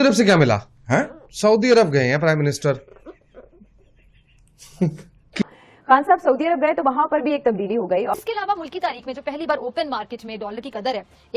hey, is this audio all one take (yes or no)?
no